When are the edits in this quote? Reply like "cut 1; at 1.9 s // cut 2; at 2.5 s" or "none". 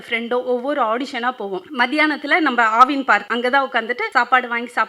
cut 1; at 1.7 s // cut 2; at 3.3 s // cut 3; at 4.0 s